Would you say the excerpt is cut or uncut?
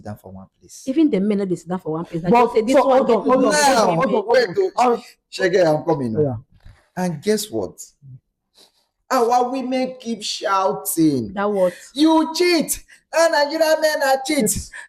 uncut